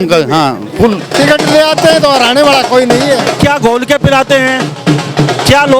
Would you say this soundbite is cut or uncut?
cut